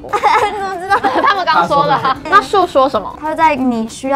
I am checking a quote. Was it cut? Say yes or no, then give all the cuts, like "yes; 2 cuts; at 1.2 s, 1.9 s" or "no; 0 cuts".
no; 0 cuts